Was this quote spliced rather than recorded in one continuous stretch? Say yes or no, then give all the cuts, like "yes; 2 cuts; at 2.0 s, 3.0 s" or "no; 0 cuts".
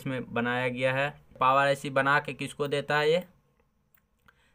yes; 1 cut; at 1.4 s